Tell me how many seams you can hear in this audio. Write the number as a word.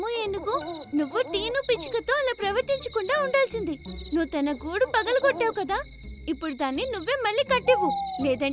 zero